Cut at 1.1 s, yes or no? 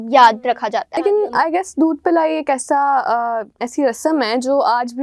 yes